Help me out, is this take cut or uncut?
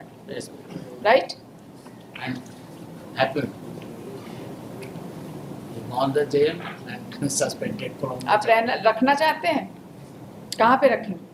uncut